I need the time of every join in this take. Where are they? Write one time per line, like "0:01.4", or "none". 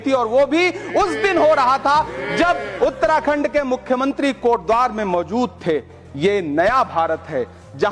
none